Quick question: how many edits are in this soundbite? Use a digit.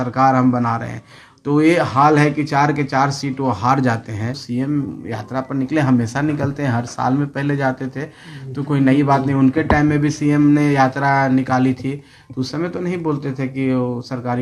1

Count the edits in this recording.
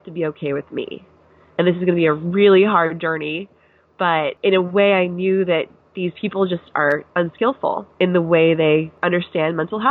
3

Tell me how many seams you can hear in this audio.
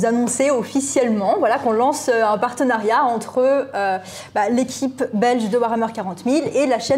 0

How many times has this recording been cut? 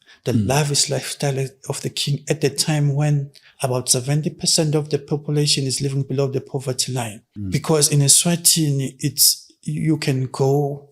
1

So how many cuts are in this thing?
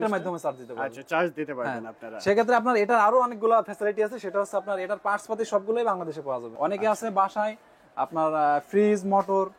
1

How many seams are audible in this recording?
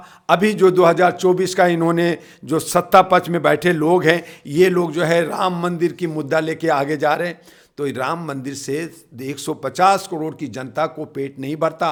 0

